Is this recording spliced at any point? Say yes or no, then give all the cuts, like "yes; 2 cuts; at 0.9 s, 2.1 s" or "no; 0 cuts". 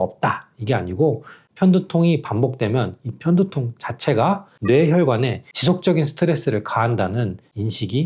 no; 0 cuts